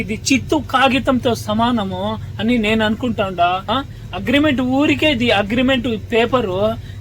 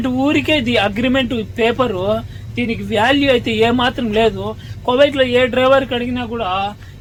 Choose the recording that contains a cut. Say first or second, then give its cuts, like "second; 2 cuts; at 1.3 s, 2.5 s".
first; 1 cut; at 3.6 s